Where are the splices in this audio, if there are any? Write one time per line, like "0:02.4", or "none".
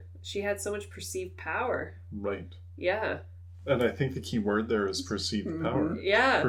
none